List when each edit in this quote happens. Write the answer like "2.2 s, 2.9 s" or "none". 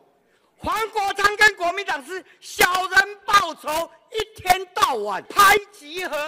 5.3 s